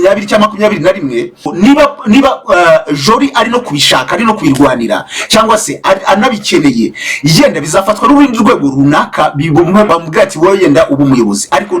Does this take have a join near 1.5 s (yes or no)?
yes